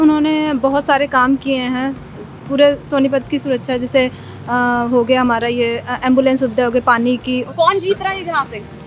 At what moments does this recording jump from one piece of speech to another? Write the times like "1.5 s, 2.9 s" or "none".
7.5 s